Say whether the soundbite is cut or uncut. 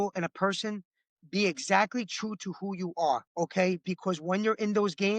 cut